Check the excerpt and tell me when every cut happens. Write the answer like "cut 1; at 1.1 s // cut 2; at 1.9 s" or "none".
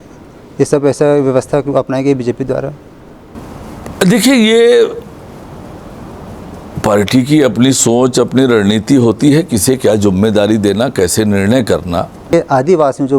cut 1; at 12.3 s